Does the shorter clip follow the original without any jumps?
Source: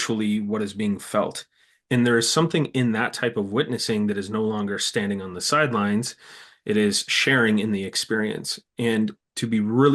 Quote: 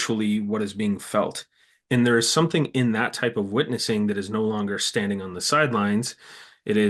yes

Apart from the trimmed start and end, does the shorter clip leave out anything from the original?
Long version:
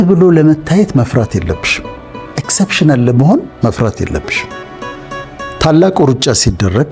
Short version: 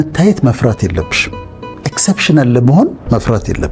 no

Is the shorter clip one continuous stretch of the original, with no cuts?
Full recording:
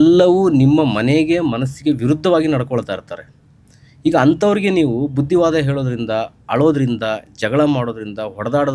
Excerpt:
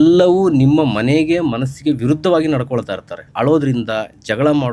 no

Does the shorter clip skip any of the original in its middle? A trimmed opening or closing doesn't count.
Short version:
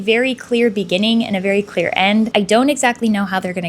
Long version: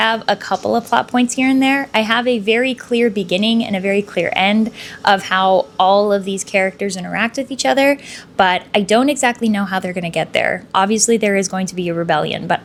yes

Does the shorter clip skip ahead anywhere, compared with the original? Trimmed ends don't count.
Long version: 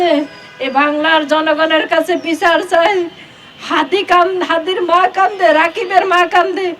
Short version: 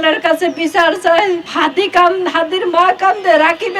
yes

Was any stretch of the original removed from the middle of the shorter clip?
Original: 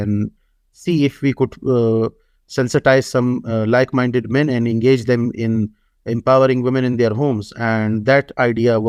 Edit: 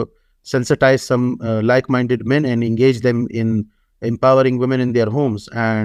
no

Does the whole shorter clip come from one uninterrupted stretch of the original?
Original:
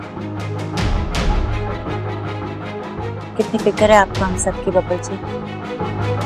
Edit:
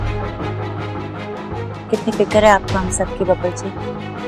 yes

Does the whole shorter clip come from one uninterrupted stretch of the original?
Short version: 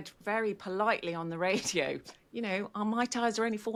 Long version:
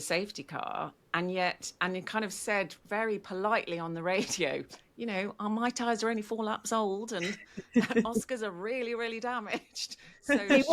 yes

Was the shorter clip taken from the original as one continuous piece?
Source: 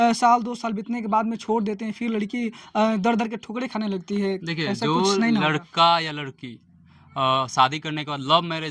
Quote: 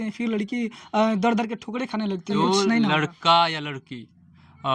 no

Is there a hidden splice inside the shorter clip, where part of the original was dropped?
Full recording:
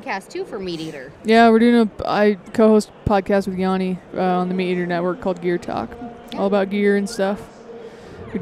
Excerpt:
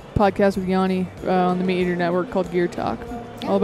no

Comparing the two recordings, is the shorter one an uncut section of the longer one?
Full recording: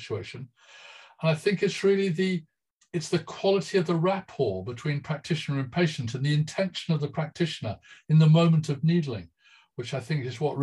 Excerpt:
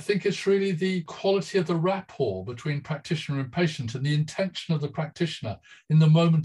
no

